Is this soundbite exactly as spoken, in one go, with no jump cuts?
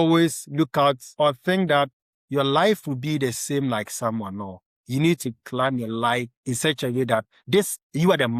no; 1 cut; at 6.3 s

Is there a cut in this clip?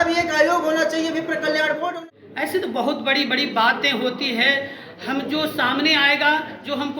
yes; 1 cut; at 1.9 s

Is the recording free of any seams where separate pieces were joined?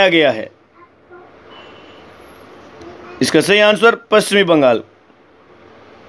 no; 1 cut; at 1.0 s

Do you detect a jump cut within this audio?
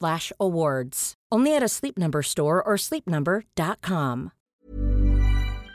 yes; 1 cut; at 4.5 s

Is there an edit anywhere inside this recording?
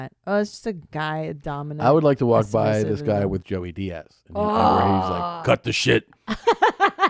no; 0 cuts

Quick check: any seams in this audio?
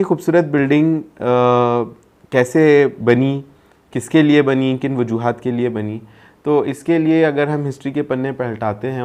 no; 0 cuts

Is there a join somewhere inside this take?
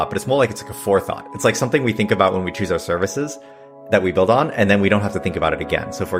no; 0 cuts

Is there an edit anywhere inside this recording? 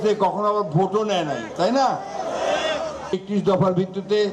yes; 1 cut; at 3.1 s

